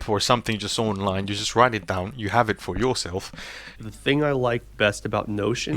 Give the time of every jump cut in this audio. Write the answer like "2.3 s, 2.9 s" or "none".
3.8 s